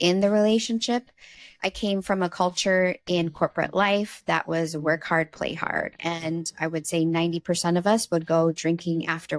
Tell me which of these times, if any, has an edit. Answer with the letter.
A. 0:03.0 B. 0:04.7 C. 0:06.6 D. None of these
D